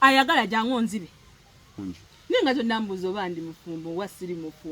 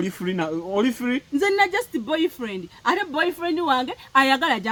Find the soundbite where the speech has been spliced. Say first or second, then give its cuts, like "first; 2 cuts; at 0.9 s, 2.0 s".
first; 1 cut; at 1.8 s